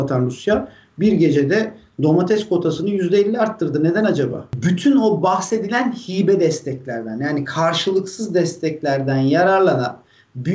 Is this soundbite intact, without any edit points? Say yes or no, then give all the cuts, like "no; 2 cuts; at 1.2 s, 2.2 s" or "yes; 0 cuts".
no; 1 cut; at 4.5 s